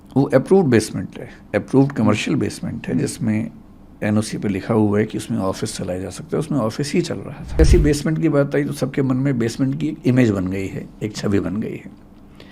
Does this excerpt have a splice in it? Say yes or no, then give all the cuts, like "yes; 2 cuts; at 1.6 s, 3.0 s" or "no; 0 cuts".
yes; 1 cut; at 7.6 s